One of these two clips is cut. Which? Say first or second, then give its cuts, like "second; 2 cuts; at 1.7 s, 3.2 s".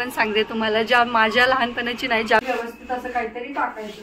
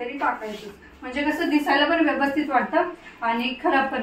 first; 1 cut; at 2.4 s